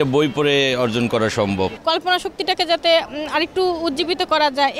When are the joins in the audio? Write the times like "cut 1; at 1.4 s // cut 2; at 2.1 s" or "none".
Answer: cut 1; at 1.8 s